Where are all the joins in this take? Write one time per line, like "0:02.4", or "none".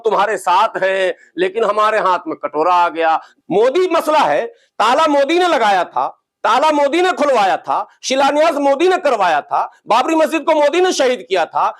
0:03.3

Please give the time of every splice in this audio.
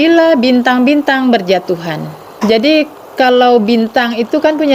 0:02.2

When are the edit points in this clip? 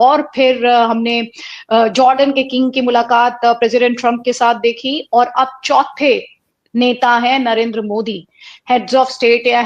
none

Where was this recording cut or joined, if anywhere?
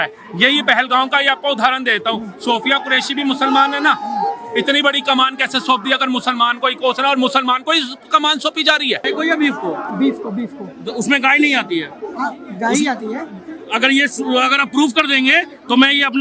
0:09.1

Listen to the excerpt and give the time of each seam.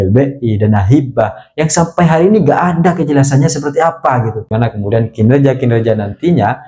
0:04.5

